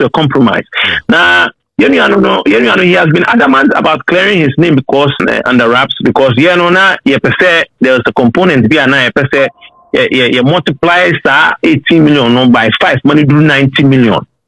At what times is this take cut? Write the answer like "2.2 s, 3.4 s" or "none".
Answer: 5.2 s